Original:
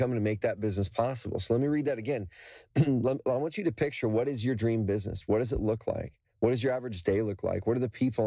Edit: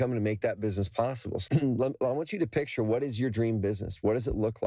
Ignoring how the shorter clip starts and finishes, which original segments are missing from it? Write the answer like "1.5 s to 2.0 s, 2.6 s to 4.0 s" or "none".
1.3 s to 2.6 s